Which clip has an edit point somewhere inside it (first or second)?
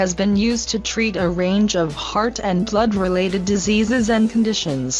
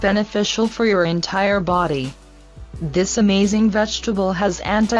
second